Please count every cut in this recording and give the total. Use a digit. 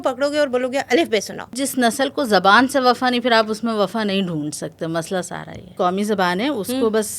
2